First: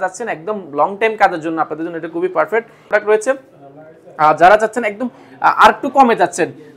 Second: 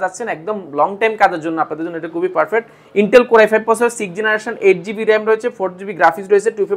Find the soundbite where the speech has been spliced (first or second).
first